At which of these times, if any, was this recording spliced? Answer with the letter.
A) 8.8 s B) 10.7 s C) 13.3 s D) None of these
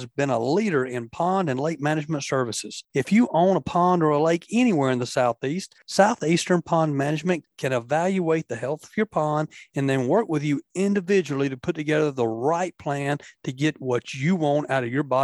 D